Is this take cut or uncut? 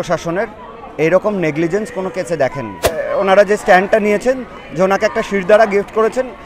cut